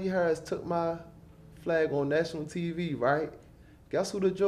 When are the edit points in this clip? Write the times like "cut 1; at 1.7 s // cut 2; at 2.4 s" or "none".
none